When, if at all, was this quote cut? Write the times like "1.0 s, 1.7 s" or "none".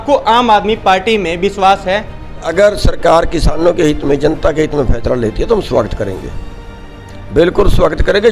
2.5 s